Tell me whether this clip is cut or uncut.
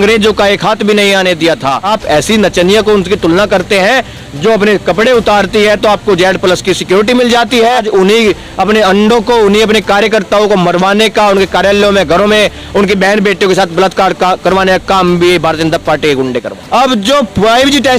cut